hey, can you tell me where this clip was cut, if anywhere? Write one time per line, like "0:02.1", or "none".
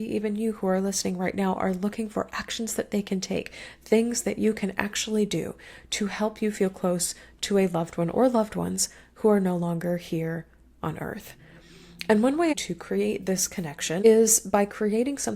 0:12.5
0:14.0